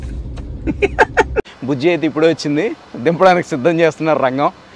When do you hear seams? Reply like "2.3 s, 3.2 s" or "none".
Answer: 1.5 s

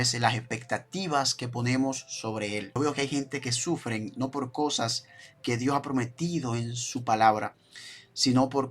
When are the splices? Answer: 2.7 s

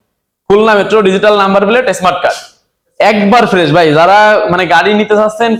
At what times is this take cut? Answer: none

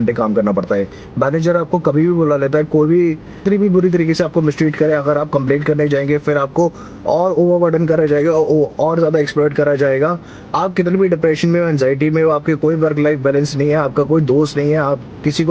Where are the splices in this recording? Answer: 3.4 s, 10.3 s

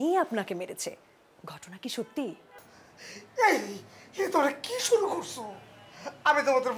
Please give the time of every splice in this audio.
2.4 s

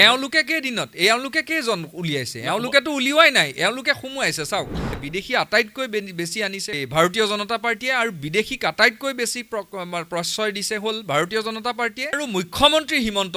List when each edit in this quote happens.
5.0 s, 6.8 s, 12.2 s

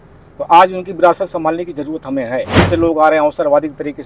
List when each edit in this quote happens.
2.6 s

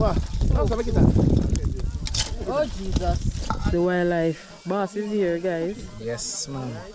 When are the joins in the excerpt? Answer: 3.6 s

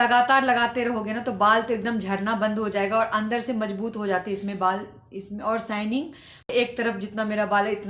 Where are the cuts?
6.5 s

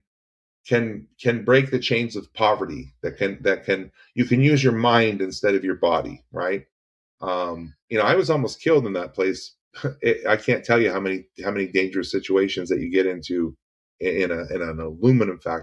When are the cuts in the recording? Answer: none

